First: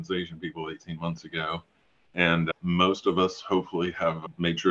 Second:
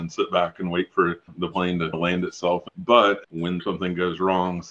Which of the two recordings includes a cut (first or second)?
second